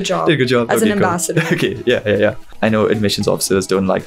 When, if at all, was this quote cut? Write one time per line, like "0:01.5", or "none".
0:02.5